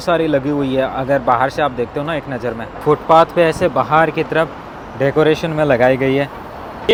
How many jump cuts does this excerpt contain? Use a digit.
0